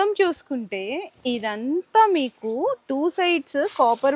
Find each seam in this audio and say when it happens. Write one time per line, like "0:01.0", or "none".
none